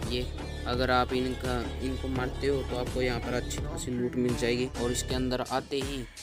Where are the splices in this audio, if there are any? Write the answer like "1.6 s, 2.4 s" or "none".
4.7 s